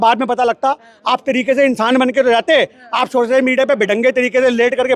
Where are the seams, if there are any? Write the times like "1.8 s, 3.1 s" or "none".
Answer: none